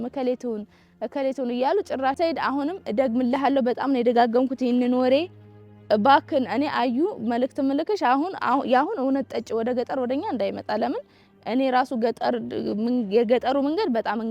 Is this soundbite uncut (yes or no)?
no